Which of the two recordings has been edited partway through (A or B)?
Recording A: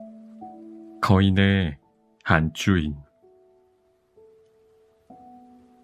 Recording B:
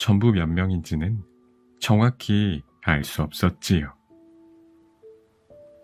A